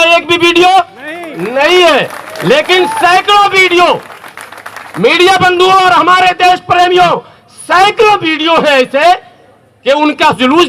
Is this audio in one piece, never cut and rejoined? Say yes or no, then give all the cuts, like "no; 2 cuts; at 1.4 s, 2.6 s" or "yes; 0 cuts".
yes; 0 cuts